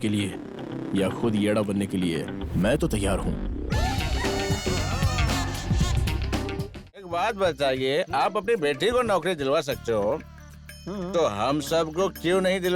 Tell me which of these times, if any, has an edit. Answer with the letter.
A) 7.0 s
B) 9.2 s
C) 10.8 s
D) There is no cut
A